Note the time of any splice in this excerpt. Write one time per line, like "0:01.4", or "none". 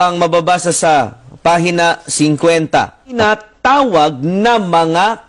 0:03.2

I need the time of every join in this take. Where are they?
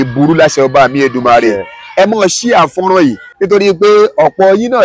0:03.3

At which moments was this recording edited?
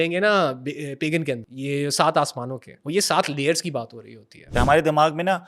0:01.5
0:02.7
0:04.4

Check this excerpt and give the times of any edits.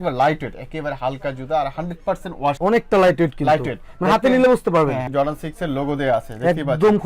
0:05.1

